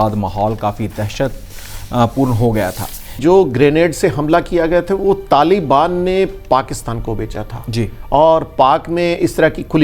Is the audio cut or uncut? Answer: cut